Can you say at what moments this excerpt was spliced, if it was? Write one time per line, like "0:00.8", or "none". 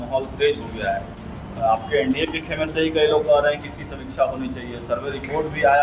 none